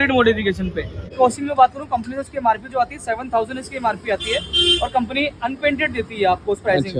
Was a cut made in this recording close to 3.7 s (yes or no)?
no